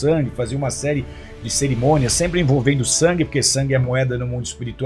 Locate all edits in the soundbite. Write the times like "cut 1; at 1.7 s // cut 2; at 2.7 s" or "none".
none